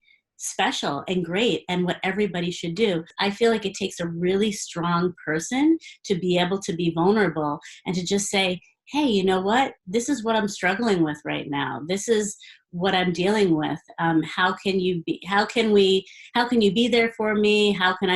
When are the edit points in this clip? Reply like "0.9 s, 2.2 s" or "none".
3.1 s